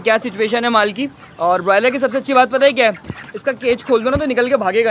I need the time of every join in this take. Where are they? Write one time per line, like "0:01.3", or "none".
none